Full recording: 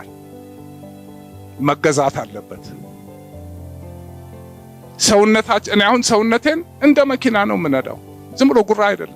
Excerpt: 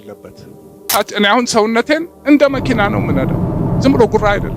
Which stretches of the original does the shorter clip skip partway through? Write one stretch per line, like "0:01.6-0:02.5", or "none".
0:03.2-0:05.5